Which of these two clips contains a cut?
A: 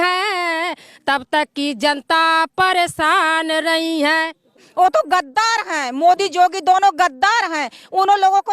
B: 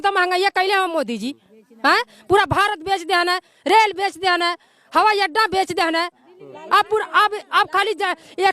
A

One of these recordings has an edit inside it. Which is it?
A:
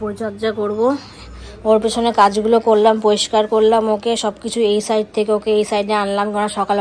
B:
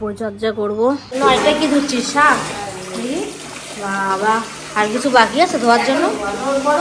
B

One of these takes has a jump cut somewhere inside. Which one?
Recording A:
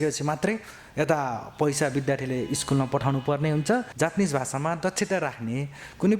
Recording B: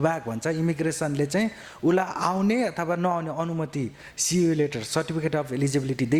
A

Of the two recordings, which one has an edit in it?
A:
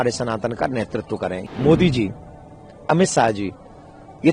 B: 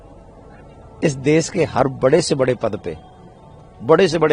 A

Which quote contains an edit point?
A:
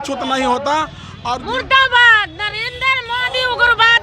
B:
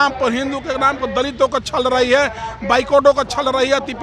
A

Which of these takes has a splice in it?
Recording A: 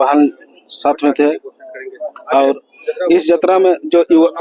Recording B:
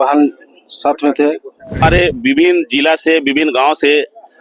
B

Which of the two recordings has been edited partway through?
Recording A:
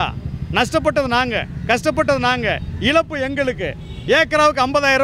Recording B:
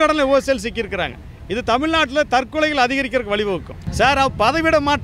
B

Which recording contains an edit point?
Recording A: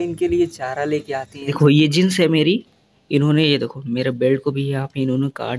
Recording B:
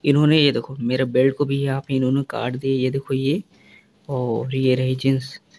A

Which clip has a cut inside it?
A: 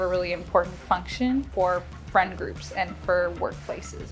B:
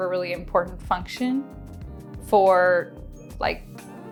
A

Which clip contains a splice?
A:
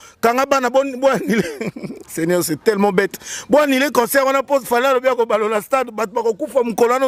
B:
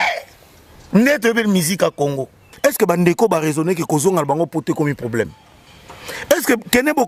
B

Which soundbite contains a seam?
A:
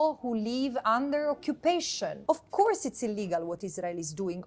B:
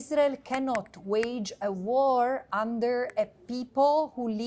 A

